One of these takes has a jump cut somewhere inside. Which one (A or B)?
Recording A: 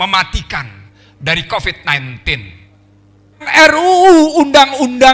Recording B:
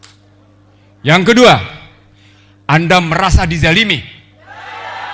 A